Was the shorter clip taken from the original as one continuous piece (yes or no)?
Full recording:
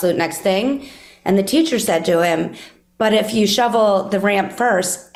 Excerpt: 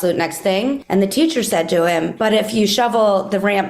no